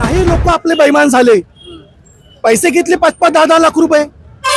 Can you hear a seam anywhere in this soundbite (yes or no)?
no